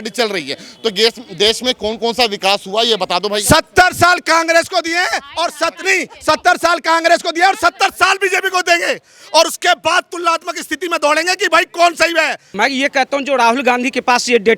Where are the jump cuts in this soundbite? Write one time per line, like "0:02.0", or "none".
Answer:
0:12.4